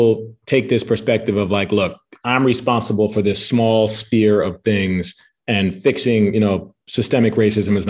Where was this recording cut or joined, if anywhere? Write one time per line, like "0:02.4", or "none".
none